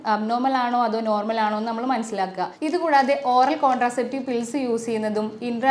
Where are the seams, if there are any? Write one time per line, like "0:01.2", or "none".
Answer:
0:02.5